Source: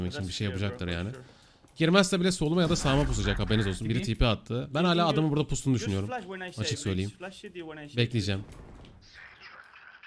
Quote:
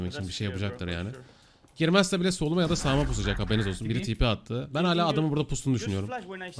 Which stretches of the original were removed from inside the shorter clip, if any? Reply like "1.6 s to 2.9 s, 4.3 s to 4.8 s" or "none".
none

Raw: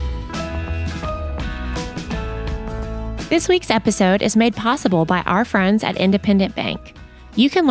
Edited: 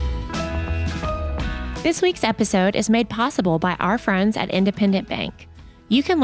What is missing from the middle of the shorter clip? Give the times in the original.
1.8 s to 3.2 s

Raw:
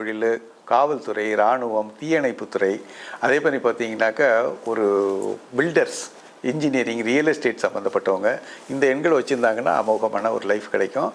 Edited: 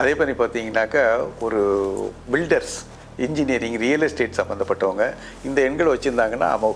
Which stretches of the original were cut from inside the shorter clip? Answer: none

